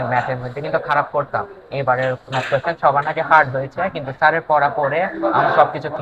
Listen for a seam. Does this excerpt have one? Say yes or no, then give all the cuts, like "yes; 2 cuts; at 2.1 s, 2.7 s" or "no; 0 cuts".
no; 0 cuts